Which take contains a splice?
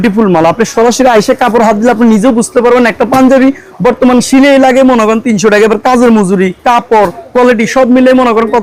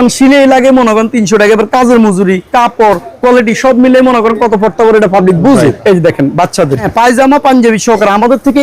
second; 2 cuts; at 5.8 s, 6.9 s

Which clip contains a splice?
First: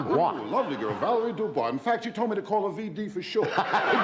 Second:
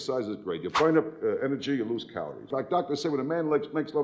second; 1 cut; at 2.5 s

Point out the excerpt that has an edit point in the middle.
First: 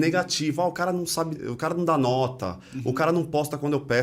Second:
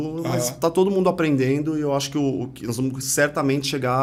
first; 1 cut; at 1.4 s

